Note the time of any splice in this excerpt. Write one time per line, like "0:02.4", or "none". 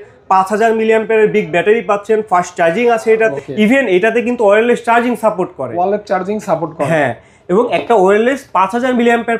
0:03.3